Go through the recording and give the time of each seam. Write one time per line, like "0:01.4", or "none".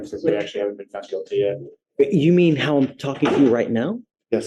none